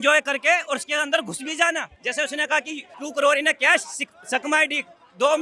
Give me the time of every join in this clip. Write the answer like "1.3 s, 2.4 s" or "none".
2.0 s, 2.8 s